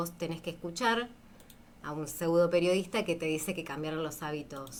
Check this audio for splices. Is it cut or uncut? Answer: uncut